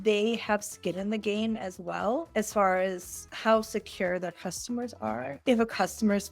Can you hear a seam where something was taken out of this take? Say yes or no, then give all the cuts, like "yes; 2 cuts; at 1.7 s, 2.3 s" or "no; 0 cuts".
yes; 1 cut; at 5.3 s